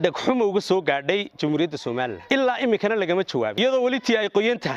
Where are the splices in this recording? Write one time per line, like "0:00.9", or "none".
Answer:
0:02.2
0:03.6